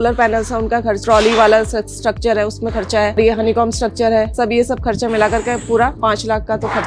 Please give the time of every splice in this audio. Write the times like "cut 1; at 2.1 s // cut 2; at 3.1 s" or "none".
cut 1; at 1.0 s // cut 2; at 3.2 s // cut 3; at 6.0 s